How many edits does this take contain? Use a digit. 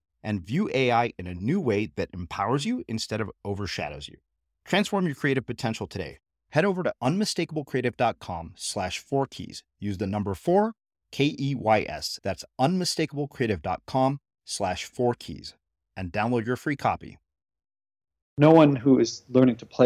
1